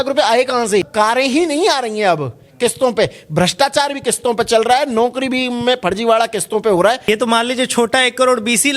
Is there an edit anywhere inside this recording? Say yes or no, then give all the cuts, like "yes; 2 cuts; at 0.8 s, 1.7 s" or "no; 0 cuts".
yes; 2 cuts; at 0.9 s, 7.0 s